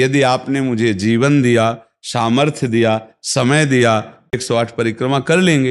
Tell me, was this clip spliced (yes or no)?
yes